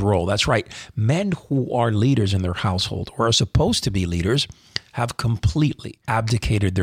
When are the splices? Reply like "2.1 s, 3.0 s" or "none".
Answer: 5.9 s